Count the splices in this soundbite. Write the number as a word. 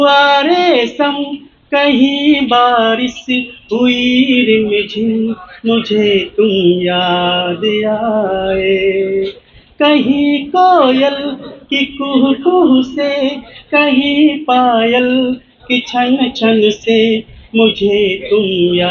zero